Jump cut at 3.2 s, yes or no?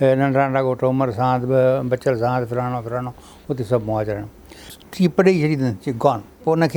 no